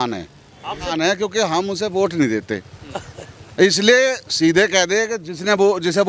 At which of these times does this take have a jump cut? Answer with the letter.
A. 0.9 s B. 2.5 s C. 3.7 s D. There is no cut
A